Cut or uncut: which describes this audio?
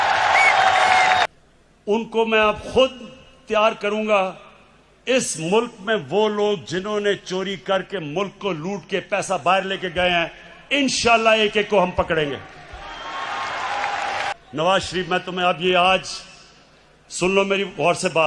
cut